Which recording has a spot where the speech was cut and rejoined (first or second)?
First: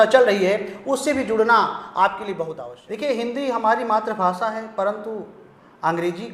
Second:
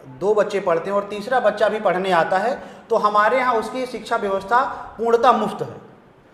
first